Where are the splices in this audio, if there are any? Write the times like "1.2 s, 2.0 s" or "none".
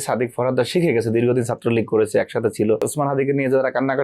2.9 s